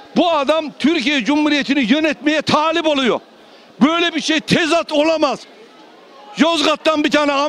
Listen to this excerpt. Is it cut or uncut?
uncut